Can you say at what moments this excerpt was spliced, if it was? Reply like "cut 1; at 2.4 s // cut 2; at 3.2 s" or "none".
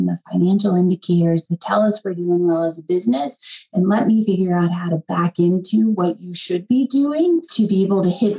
cut 1; at 7.5 s